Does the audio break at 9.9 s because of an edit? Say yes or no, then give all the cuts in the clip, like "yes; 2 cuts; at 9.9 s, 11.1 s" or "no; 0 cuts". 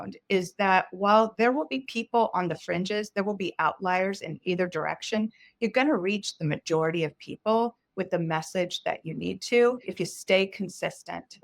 yes; 1 cut; at 9.9 s